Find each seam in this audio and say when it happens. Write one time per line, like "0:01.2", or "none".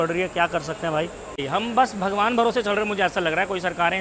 0:01.4